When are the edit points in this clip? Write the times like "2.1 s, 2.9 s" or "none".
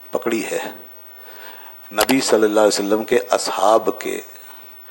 none